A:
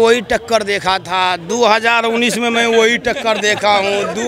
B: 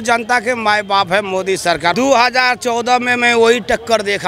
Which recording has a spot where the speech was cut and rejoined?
B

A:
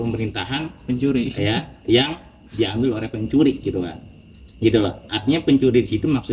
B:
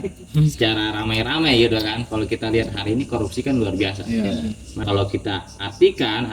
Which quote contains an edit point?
B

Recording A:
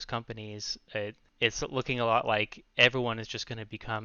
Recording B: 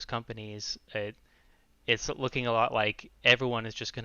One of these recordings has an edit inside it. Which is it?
A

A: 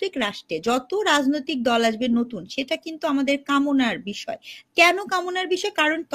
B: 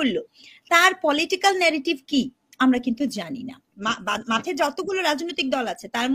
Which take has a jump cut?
B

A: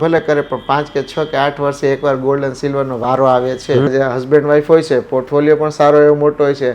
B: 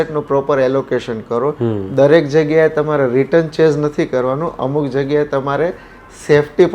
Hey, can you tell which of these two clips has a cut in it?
A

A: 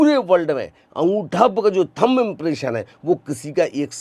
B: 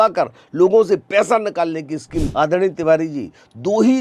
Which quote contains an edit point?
B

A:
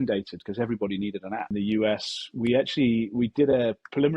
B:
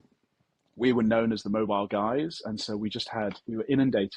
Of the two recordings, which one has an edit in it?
A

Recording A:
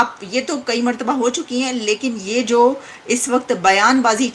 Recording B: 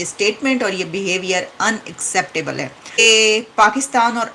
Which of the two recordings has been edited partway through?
B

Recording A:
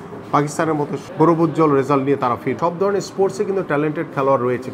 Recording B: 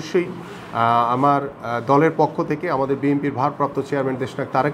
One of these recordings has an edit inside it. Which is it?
A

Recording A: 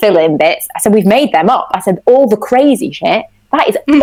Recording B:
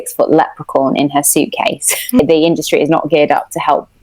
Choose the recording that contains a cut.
B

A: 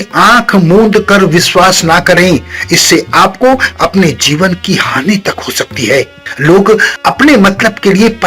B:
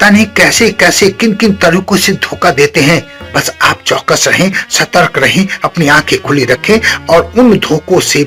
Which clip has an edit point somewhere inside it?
A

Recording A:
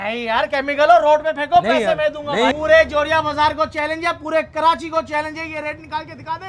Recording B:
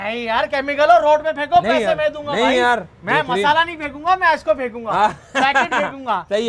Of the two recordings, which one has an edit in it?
A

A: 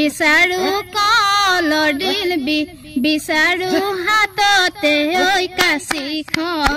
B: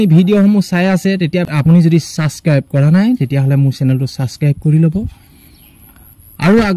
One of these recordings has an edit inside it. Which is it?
B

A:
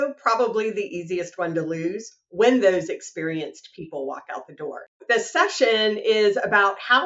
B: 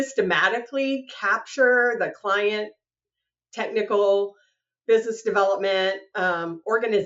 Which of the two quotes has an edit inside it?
A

